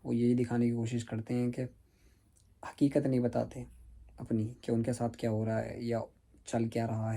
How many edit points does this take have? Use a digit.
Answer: 0